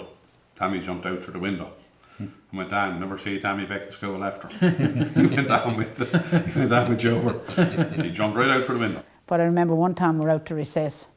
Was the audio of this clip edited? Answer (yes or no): no